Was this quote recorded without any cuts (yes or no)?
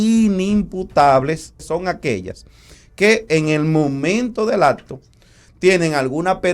no